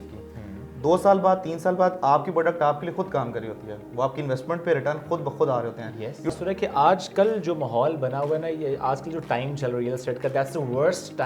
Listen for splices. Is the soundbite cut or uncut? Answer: cut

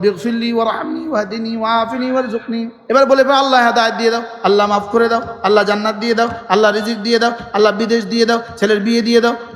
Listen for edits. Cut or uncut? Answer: cut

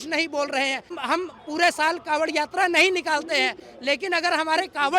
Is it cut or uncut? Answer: cut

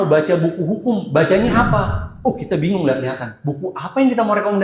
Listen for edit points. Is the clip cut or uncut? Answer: uncut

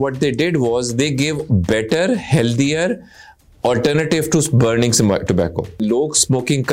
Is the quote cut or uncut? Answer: cut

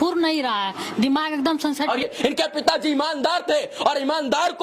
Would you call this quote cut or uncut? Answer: cut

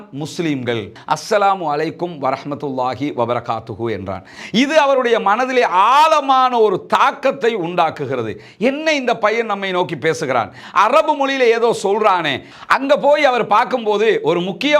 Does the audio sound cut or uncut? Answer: cut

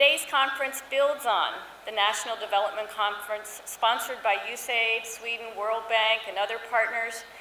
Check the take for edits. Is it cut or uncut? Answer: uncut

